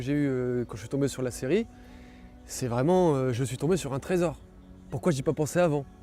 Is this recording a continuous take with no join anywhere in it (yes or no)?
yes